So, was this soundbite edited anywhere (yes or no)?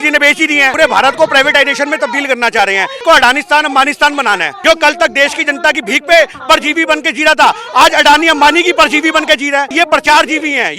yes